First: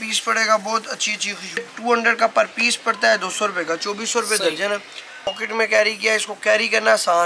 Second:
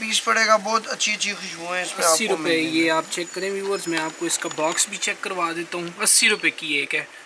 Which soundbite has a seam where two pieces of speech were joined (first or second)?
first